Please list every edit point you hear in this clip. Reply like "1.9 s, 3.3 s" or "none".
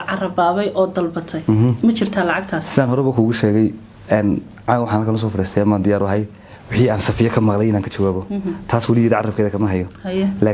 none